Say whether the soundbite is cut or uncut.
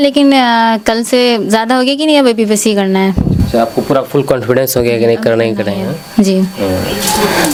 uncut